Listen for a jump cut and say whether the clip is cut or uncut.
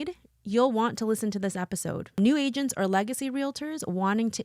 cut